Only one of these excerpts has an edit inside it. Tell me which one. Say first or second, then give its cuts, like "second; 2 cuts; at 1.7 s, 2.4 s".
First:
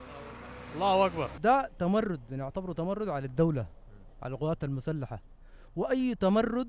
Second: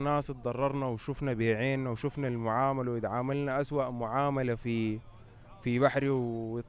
first; 1 cut; at 1.4 s